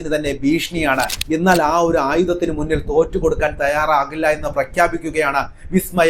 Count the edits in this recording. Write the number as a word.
one